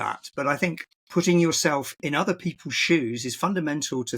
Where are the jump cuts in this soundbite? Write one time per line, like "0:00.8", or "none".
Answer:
0:00.9
0:01.9